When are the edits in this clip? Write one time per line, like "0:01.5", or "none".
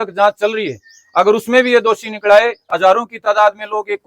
0:02.7